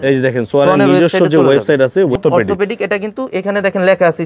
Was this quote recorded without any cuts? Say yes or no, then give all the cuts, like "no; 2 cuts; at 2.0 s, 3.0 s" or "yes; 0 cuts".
no; 1 cut; at 2.2 s